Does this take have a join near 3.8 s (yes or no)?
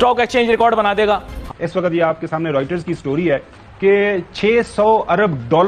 no